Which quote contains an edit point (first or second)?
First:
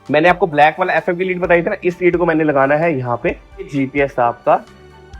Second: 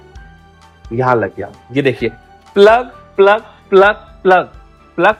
first